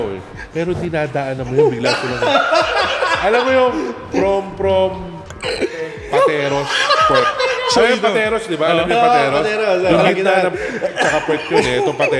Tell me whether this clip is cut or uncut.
uncut